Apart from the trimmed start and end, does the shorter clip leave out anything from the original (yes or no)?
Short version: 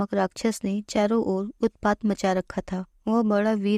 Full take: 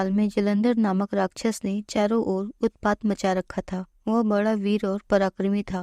no